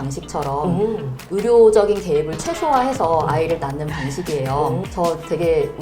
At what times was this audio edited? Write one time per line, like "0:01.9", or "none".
0:04.8